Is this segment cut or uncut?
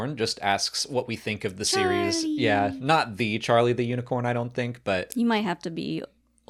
uncut